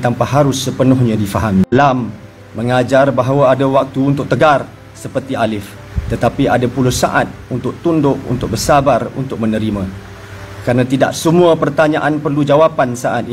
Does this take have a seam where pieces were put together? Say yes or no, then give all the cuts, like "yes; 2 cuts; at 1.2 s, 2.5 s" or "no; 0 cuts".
yes; 1 cut; at 1.7 s